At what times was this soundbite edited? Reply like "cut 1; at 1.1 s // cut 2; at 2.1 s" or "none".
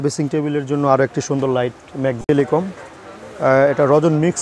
cut 1; at 2.2 s